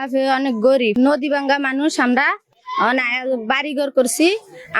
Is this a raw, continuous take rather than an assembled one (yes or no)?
no